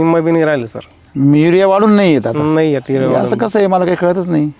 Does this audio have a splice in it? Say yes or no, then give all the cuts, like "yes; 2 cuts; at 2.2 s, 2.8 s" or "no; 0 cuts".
no; 0 cuts